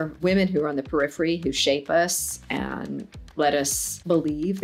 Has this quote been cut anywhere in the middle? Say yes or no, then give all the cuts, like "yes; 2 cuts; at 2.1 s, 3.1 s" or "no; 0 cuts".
no; 0 cuts